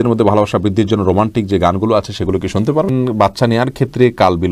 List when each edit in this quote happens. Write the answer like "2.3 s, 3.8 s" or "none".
2.9 s

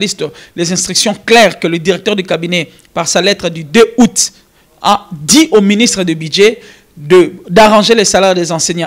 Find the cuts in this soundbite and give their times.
none

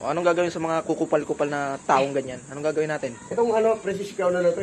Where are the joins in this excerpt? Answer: 1.6 s

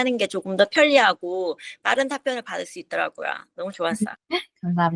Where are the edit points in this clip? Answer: none

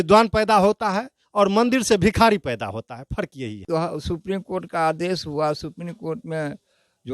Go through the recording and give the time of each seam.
3.7 s

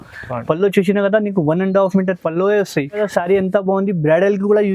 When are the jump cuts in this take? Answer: 3.0 s

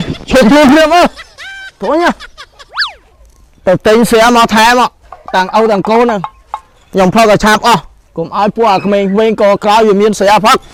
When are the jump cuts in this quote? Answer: none

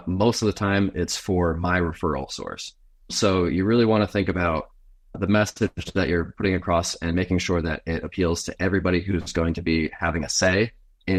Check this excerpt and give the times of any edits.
none

